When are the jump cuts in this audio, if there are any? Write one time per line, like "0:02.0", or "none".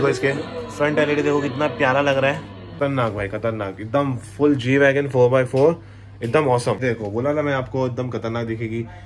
0:02.7
0:06.8